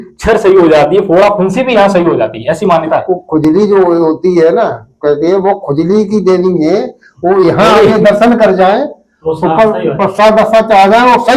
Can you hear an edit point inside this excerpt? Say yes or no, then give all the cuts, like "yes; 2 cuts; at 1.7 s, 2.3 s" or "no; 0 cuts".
no; 0 cuts